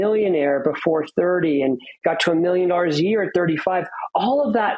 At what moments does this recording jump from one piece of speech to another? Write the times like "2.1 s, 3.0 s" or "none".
none